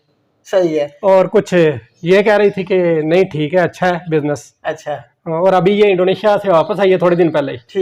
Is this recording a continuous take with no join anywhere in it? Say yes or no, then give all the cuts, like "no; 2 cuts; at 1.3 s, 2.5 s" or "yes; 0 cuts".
yes; 0 cuts